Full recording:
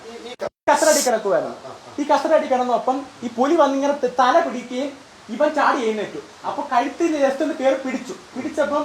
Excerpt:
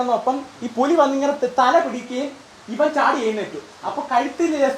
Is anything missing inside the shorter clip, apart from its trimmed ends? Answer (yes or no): no